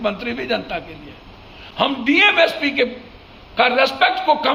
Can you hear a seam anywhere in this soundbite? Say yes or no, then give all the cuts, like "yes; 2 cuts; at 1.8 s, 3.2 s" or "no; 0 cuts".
no; 0 cuts